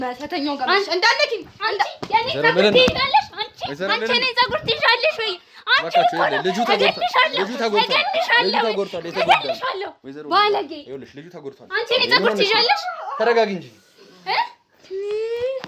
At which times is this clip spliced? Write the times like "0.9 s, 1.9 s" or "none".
none